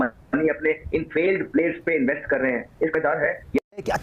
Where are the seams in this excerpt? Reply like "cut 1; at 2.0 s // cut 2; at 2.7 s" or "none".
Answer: none